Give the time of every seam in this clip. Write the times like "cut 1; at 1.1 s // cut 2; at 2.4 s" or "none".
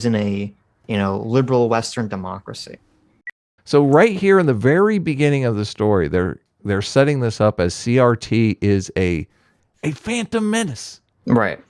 cut 1; at 3.6 s